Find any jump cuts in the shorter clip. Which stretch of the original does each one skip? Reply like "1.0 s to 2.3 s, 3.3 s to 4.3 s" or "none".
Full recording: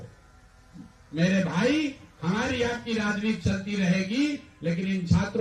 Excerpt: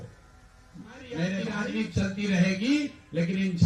1.5 s to 3.0 s